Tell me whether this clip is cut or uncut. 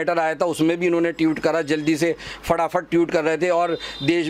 uncut